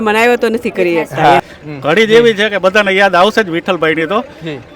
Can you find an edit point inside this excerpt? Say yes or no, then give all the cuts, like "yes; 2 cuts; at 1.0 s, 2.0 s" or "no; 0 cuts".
yes; 1 cut; at 1.5 s